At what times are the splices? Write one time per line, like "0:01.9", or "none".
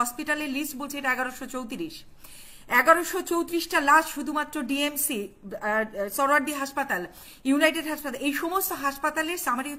none